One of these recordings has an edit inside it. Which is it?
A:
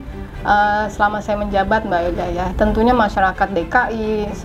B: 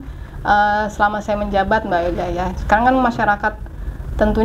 A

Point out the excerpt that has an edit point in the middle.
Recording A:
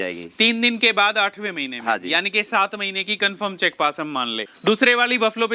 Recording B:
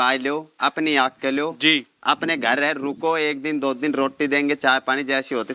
A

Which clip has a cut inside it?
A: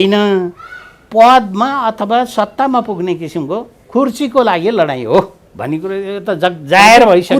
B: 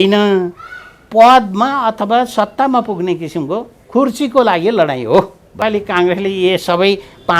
B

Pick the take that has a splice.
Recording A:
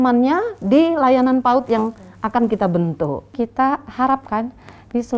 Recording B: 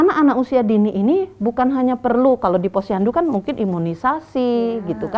A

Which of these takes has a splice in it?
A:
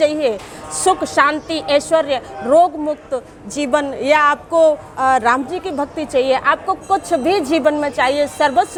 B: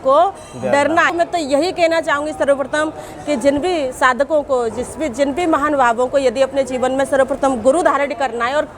B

